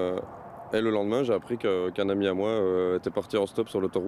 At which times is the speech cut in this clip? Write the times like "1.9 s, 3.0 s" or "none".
2.1 s